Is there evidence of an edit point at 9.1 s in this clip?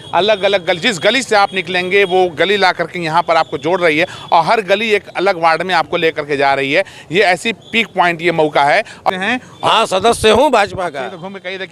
yes; 1 cut; at 9.1 s

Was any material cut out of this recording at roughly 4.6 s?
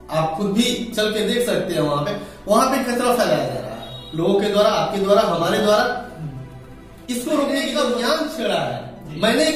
no; 1 cut; at 7.7 s

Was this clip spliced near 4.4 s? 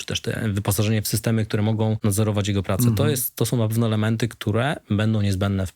no; 1 cut; at 2.0 s

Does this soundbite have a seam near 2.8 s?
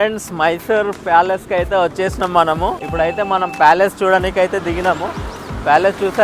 yes; 1 cut; at 2.8 s

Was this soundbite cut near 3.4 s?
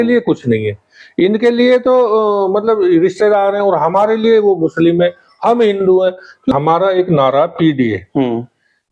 no; 1 cut; at 6.5 s

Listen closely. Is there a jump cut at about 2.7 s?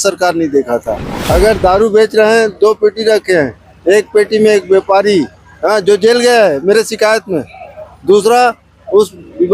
no; 1 cut; at 1.1 s

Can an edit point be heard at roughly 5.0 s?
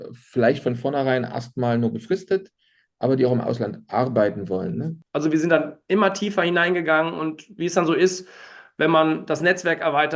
yes; 1 cut; at 5.0 s

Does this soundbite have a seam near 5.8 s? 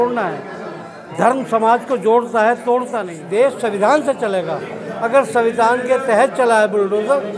no; 1 cut; at 3.2 s

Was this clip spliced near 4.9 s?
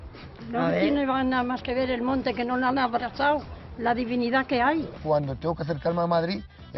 yes; 1 cut; at 4.9 s

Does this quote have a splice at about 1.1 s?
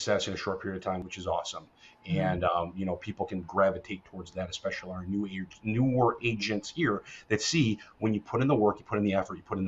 yes; 1 cut; at 1.1 s

